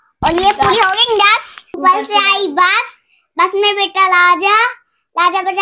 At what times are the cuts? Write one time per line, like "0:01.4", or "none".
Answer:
0:01.6